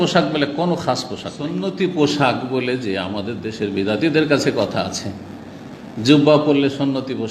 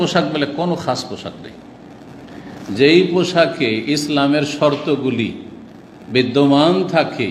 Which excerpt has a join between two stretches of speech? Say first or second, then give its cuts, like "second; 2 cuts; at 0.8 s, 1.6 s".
first; 1 cut; at 1.6 s